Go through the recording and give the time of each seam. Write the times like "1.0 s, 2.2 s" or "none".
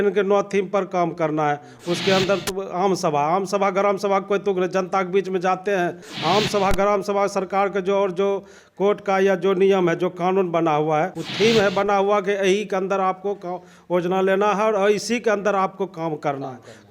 6.1 s, 11.2 s

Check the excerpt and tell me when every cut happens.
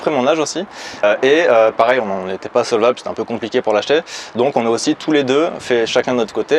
1.0 s

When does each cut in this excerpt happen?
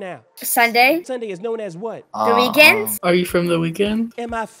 1.1 s, 3.0 s

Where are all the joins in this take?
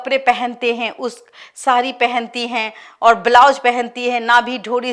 none

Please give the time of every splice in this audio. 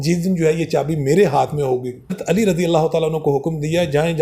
2.2 s

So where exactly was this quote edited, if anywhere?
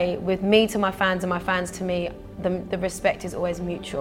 none

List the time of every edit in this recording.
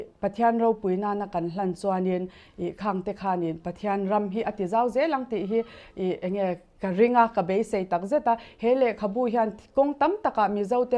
none

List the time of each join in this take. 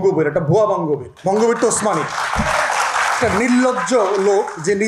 1.1 s

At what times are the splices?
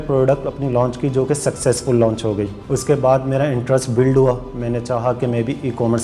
2.6 s

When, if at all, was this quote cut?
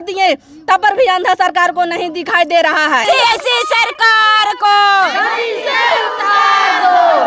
3.0 s

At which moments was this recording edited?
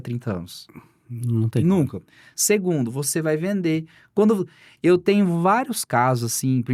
none

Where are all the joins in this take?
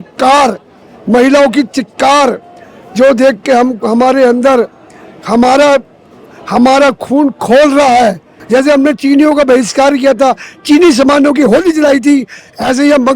8.3 s

